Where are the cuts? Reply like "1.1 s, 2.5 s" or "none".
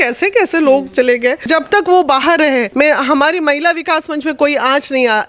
1.5 s, 2.7 s